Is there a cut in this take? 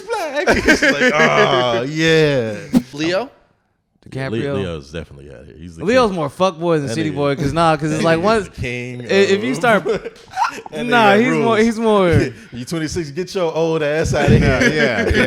yes; 1 cut; at 2.8 s

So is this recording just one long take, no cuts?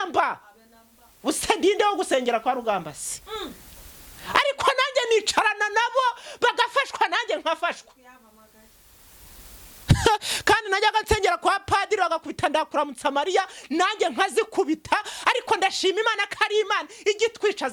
yes; 0 cuts

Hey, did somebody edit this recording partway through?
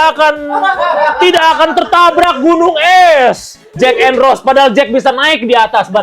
yes; 1 cut; at 3.7 s

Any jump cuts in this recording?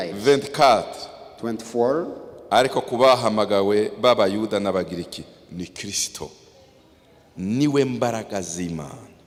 no; 0 cuts

